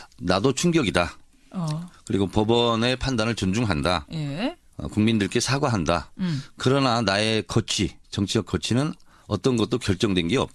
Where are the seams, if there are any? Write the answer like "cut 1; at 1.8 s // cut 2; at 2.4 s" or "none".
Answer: cut 1; at 7.5 s